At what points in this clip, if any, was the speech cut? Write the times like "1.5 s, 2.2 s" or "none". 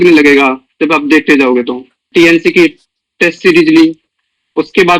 2.0 s